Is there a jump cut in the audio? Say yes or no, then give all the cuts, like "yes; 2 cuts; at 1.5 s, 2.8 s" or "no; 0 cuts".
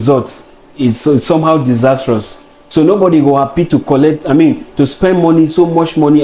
no; 0 cuts